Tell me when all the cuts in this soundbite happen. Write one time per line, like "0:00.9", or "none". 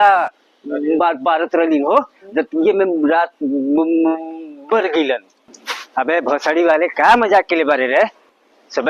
0:02.2